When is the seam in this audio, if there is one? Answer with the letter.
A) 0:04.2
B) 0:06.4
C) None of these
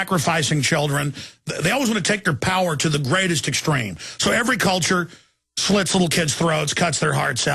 B